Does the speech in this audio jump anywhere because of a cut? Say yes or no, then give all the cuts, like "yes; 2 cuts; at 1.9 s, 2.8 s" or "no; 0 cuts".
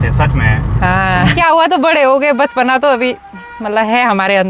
yes; 1 cut; at 1.3 s